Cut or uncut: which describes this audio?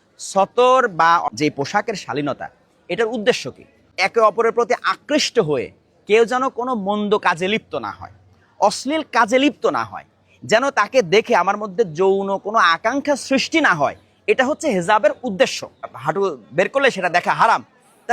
cut